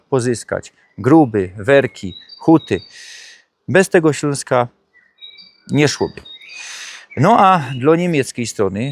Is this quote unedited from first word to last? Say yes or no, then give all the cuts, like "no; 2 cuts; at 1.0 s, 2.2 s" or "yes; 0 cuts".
yes; 0 cuts